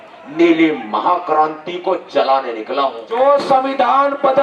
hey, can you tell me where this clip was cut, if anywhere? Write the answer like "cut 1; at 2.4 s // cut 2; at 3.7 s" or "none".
cut 1; at 3.0 s